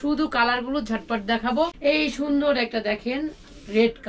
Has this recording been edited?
yes; 1 cut; at 1.8 s

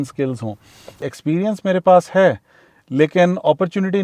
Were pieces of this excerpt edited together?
yes; 1 cut; at 1.0 s

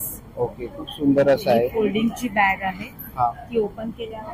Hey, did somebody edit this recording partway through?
no; 0 cuts

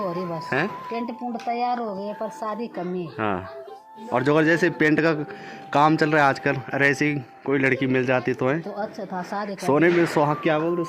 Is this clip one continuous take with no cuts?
yes; 0 cuts

